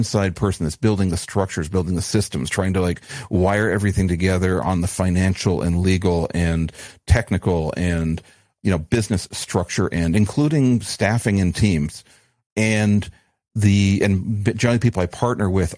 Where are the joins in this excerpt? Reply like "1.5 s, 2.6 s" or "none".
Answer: 8.4 s, 12.1 s